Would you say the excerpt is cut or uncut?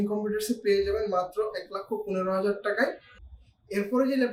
uncut